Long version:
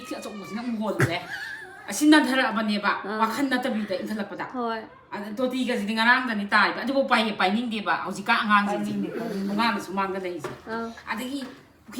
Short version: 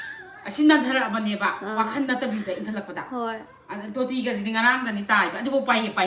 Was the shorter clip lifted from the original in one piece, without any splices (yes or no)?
yes